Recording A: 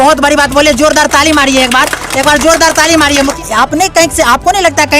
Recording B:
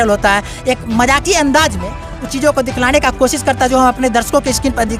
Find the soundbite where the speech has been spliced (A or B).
A